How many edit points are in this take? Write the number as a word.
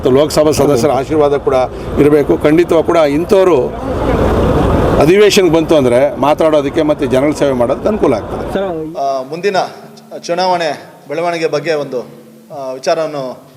one